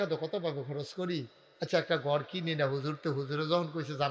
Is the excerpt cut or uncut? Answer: uncut